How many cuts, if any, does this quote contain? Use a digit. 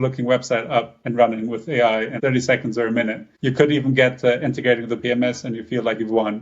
3